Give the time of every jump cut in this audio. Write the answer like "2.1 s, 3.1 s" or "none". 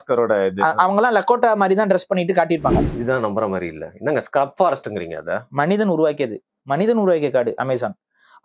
2.9 s

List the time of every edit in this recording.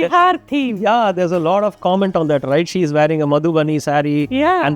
none

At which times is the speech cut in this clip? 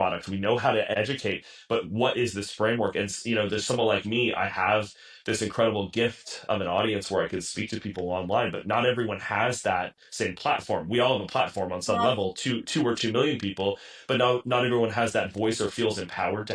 0.9 s

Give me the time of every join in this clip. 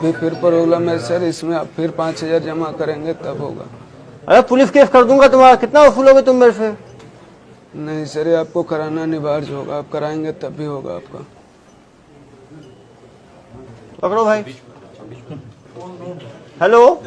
13.8 s

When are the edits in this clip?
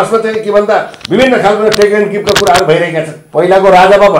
3.2 s

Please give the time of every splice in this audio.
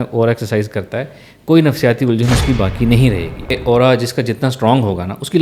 3.5 s

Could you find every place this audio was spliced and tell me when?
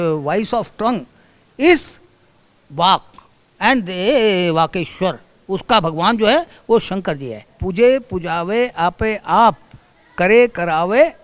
7.5 s

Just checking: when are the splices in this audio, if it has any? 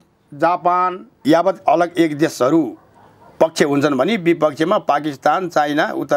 1.2 s

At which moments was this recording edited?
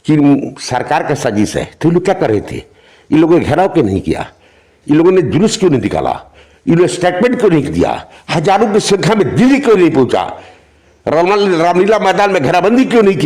none

